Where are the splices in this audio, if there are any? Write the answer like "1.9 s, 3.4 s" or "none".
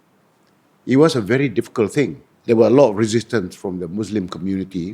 2.3 s